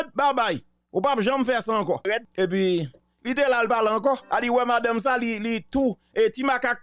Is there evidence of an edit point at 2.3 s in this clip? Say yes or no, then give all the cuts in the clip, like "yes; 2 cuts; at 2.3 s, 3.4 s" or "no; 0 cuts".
yes; 1 cut; at 2.3 s